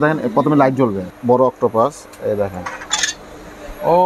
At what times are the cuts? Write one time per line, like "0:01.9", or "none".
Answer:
0:01.1